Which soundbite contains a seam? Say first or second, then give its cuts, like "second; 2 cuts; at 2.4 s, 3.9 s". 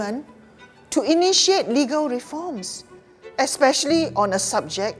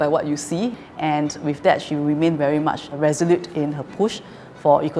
second; 2 cuts; at 0.9 s, 2.6 s